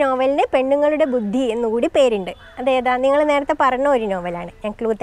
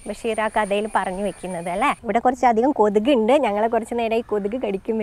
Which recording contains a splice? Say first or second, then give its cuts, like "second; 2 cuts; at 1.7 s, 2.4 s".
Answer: second; 1 cut; at 2.0 s